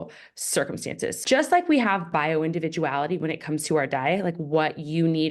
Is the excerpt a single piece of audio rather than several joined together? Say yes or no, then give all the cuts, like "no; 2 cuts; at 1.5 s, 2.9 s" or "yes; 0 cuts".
no; 1 cut; at 1.2 s